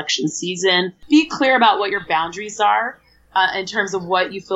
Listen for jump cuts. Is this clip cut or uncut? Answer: cut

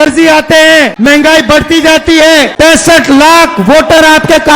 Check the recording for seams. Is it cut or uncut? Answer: cut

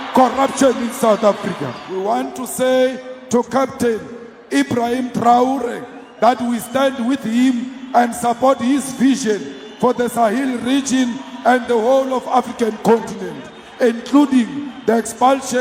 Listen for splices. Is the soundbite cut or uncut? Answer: cut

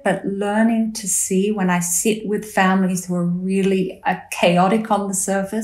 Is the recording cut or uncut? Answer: uncut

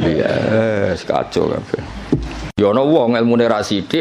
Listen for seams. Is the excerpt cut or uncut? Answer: cut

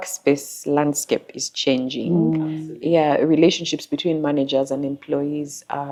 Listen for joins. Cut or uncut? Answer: uncut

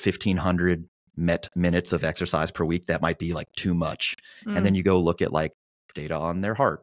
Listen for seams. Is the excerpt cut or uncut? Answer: uncut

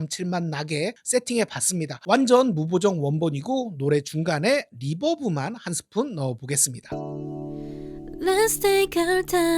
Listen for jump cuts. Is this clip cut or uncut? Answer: cut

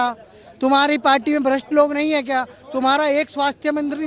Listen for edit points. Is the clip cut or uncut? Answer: uncut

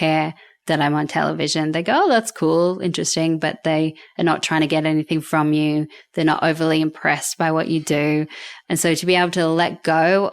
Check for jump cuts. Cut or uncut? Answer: cut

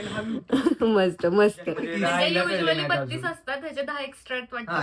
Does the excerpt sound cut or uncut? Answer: cut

